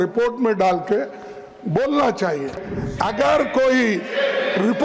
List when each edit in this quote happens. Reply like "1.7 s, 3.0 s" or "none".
2.7 s